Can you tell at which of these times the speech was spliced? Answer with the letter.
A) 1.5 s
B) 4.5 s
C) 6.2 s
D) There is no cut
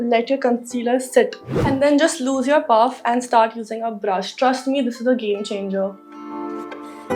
A